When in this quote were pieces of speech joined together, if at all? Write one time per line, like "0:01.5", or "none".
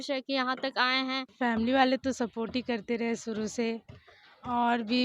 0:01.3